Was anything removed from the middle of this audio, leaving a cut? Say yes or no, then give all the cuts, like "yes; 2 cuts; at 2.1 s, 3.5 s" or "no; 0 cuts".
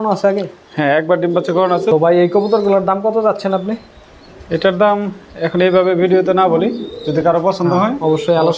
yes; 1 cut; at 1.9 s